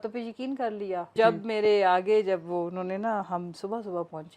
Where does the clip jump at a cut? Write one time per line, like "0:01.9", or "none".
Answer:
0:01.1

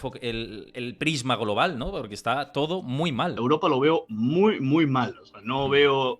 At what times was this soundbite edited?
0:03.4

